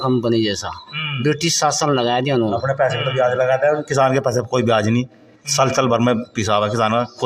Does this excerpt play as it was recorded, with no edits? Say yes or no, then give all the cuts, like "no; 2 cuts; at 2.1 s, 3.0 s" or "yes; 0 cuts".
yes; 0 cuts